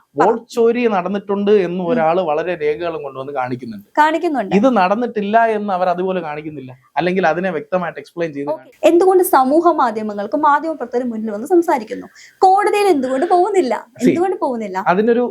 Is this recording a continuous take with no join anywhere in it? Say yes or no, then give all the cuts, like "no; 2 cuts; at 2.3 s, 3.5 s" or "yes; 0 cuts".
no; 1 cut; at 8.3 s